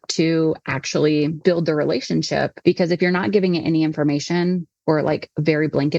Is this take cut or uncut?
cut